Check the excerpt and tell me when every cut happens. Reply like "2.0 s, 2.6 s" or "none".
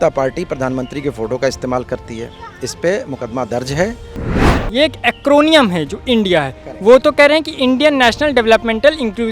4.6 s